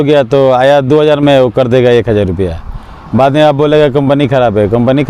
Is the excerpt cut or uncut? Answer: uncut